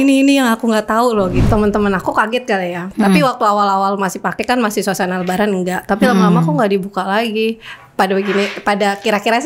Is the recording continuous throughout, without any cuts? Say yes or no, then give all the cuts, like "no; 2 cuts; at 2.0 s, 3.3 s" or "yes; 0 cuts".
no; 1 cut; at 1.5 s